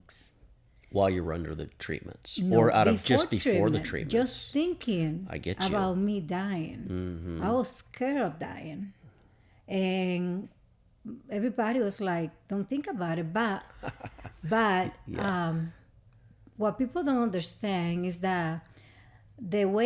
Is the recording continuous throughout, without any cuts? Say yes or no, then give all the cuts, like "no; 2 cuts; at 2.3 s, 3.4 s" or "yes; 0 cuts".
yes; 0 cuts